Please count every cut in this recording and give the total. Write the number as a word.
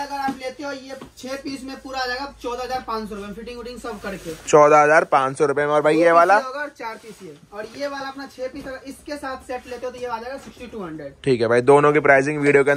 zero